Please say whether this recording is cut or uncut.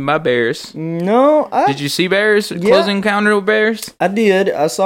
uncut